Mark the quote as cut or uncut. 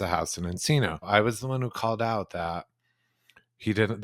cut